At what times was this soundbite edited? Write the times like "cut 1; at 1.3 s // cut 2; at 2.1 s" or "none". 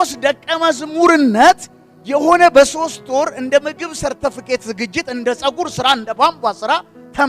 none